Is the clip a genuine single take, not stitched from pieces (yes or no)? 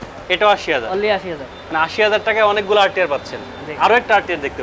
yes